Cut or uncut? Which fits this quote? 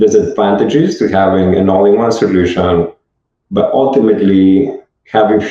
uncut